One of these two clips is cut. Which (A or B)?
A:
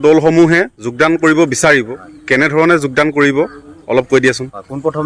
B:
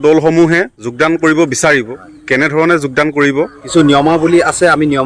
B